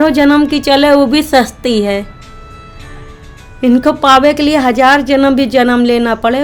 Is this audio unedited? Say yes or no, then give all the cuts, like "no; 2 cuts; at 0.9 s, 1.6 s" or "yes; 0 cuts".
yes; 0 cuts